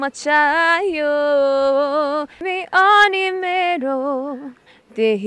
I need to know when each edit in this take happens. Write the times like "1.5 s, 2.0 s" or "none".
2.4 s

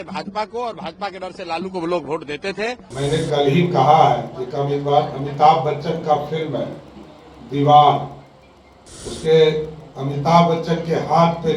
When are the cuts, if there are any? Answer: 2.8 s

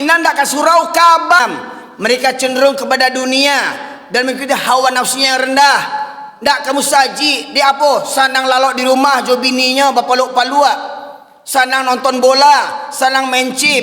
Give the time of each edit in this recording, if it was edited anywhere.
1.4 s

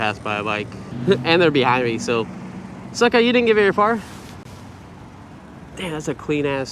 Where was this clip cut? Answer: none

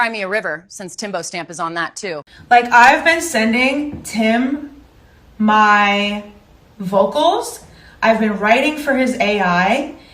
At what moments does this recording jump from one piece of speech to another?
2.2 s

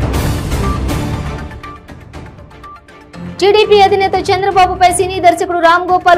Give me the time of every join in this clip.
1.5 s

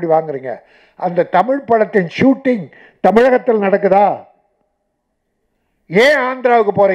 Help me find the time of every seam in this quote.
none

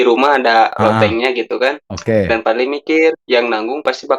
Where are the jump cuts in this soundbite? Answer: 1.9 s, 3.2 s

